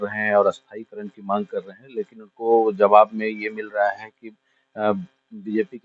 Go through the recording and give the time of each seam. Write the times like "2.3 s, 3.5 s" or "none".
none